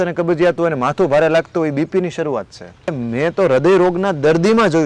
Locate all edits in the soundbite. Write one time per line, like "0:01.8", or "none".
0:02.9